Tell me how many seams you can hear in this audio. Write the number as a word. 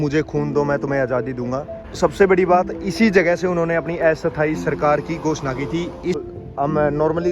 two